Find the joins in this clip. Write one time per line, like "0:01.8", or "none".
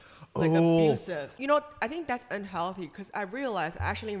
0:01.3

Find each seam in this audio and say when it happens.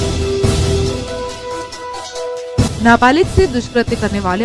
none

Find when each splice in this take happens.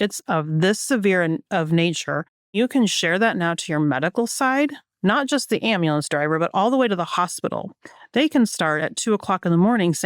0:02.6

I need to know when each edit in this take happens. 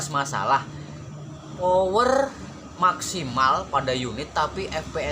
0:01.6

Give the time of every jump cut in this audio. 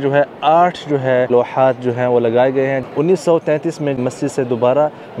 0:01.3
0:02.8
0:04.0

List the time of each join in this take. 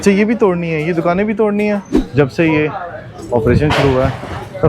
0:02.0

